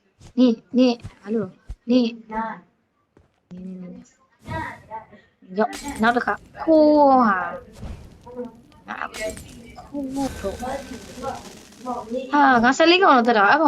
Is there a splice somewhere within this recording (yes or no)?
yes